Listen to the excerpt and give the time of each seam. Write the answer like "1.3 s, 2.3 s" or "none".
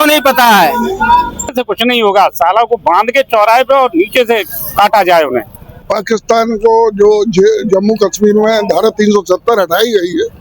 1.6 s, 5.9 s